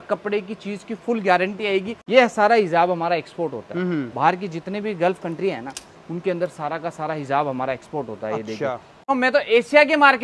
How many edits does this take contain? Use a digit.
2